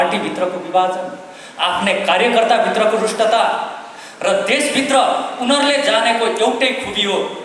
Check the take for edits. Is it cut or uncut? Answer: uncut